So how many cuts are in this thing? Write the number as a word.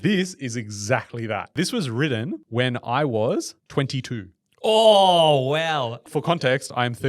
four